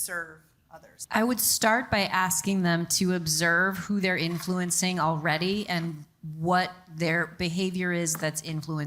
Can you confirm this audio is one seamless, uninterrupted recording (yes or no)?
no